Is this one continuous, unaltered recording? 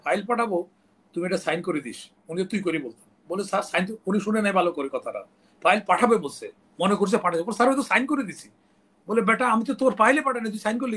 yes; 0 cuts

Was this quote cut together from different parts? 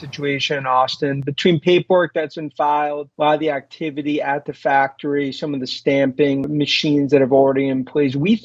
yes; 2 cuts; at 3.1 s, 6.5 s

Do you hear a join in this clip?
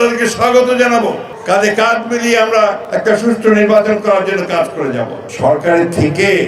yes; 2 cuts; at 1.3 s, 5.3 s

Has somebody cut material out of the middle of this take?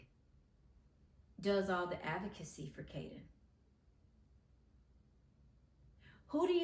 no; 0 cuts

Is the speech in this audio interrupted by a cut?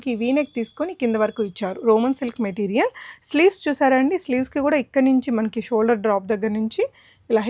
no; 0 cuts

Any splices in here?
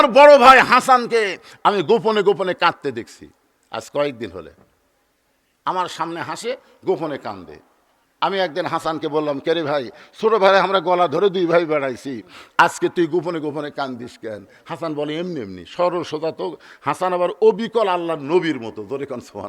no; 0 cuts

